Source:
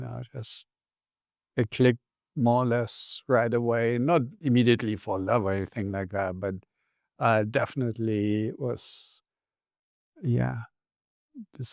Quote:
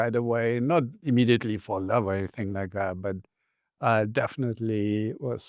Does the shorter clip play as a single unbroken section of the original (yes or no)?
yes